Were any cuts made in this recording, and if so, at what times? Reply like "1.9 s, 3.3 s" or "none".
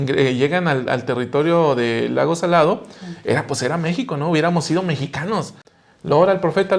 5.6 s